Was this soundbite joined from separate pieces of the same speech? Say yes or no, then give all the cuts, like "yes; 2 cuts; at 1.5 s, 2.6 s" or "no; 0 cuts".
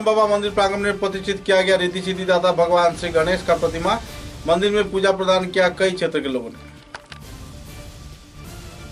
no; 0 cuts